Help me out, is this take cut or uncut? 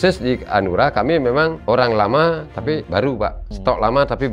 cut